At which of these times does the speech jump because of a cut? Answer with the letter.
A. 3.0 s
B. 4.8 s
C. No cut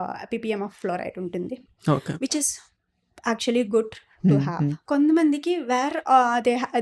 B